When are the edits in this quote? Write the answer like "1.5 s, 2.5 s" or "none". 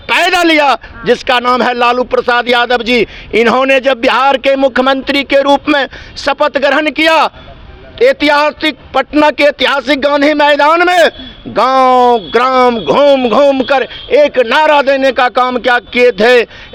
none